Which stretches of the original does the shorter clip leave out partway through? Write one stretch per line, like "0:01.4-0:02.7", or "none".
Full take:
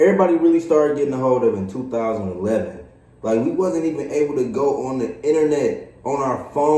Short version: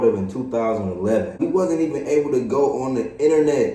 0:02.8-0:03.4